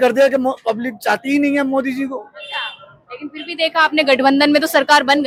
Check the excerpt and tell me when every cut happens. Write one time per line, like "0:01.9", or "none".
none